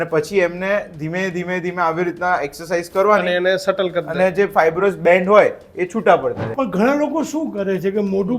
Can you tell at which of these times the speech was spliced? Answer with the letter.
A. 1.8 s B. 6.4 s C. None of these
B